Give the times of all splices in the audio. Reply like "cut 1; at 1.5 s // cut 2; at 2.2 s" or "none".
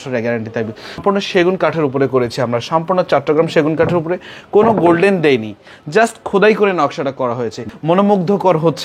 cut 1; at 1.0 s // cut 2; at 7.7 s